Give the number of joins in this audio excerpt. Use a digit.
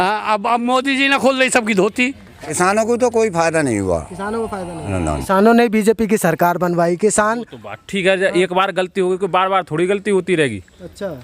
2